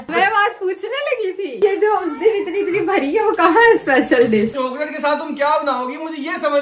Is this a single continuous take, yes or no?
no